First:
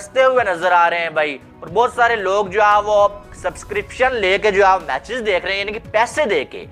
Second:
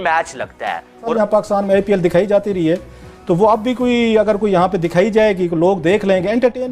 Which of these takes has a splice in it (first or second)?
second